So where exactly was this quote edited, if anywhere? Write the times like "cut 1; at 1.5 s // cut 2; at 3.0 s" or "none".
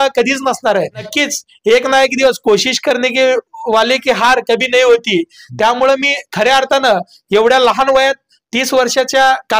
cut 1; at 1.1 s